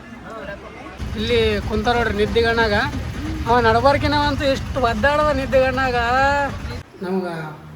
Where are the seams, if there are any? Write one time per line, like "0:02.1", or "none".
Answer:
0:01.0
0:06.8